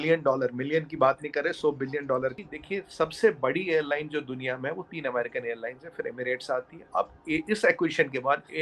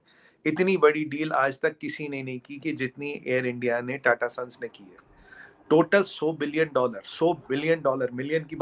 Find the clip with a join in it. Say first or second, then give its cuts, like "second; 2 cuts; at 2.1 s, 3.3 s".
first; 1 cut; at 2.4 s